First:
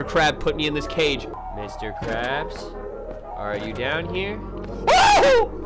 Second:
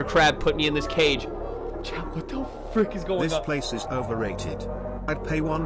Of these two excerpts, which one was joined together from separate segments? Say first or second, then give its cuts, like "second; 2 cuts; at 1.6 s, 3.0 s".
first; 1 cut; at 1.3 s